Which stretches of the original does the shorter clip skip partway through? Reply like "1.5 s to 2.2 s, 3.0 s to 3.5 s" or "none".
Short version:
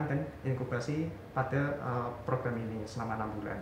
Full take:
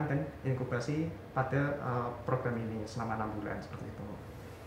none